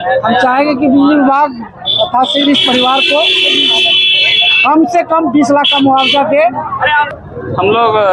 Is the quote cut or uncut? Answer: cut